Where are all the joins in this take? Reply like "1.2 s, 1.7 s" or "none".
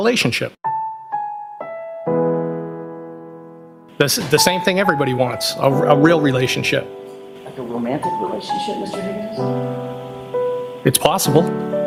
none